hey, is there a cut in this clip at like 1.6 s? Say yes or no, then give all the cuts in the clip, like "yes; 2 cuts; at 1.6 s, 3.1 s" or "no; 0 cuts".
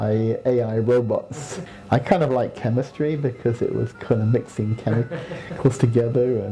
yes; 1 cut; at 1.6 s